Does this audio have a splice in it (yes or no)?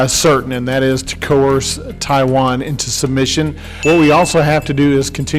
yes